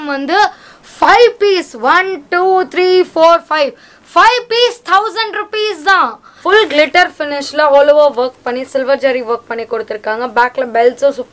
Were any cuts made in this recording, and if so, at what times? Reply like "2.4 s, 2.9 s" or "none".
6.3 s